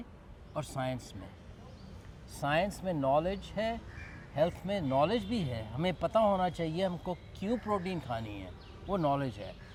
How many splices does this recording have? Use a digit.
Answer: 0